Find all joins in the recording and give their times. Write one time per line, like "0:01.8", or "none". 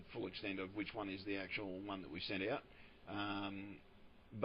0:01.5